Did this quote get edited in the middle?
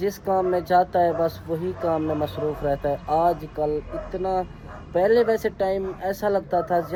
no; 0 cuts

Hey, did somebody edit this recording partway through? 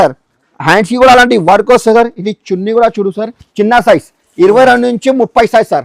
yes; 1 cut; at 3.4 s

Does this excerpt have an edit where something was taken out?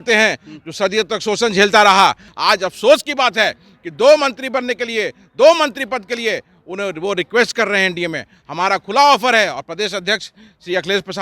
yes; 1 cut; at 2.3 s

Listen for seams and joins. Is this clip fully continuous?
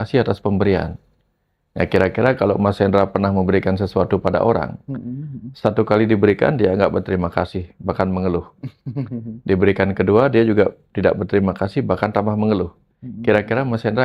yes; 0 cuts

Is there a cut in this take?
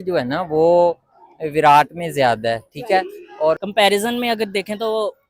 yes; 1 cut; at 3.6 s

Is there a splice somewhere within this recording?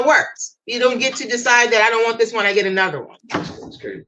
yes; 1 cut; at 3.1 s

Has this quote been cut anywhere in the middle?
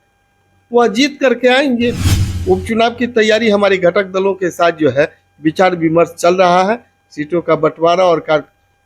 yes; 1 cut; at 2.3 s

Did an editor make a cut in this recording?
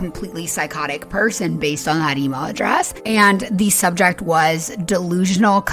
yes; 1 cut; at 3.0 s

